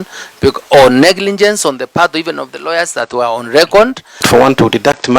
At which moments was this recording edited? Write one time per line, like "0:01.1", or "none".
0:04.2